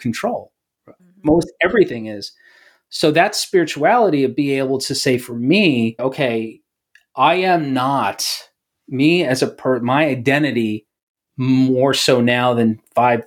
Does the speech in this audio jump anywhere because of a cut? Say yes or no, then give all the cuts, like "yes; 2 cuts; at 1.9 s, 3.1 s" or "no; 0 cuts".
yes; 2 cuts; at 1.0 s, 6.0 s